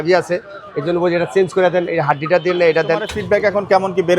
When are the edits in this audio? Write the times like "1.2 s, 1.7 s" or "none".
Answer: 3.1 s